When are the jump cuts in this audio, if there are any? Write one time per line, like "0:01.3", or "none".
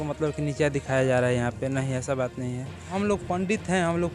0:02.9